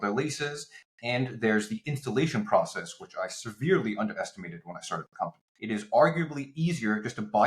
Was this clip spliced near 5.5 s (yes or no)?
yes